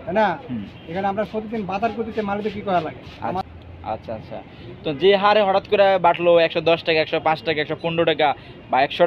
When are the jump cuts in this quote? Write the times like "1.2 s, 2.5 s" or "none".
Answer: 3.4 s